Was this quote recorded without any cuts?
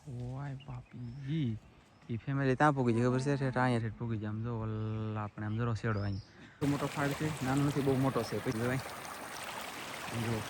no; 2 cuts; at 6.6 s, 8.6 s

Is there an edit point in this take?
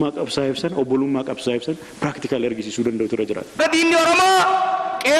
yes; 1 cut; at 3.6 s

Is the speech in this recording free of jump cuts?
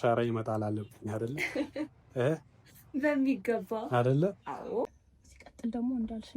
no; 1 cut; at 5.1 s

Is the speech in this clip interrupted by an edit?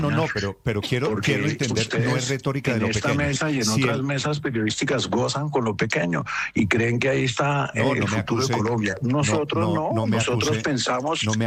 no; 0 cuts

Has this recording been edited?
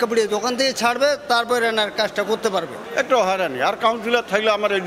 yes; 1 cut; at 2.8 s

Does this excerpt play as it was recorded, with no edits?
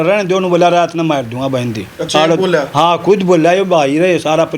yes; 0 cuts

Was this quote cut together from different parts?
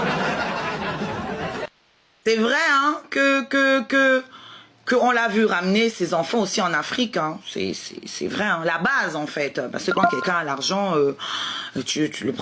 no; 0 cuts

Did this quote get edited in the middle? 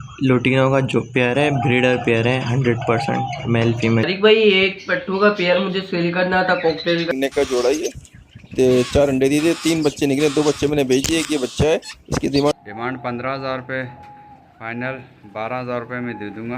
yes; 3 cuts; at 4.1 s, 7.1 s, 12.5 s

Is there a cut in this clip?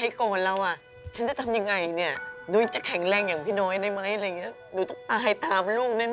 yes; 1 cut; at 2.3 s

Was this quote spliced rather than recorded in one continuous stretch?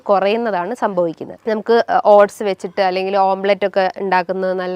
yes; 1 cut; at 1.3 s

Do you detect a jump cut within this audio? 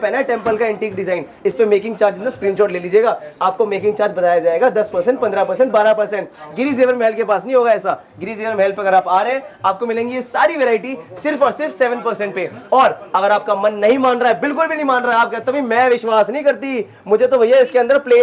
no; 0 cuts

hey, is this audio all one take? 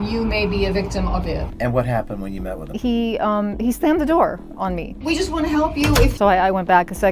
no; 3 cuts; at 1.5 s, 5.0 s, 6.1 s

